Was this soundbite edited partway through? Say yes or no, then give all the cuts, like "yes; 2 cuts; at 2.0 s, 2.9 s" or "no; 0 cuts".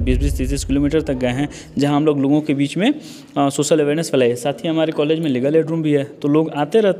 no; 0 cuts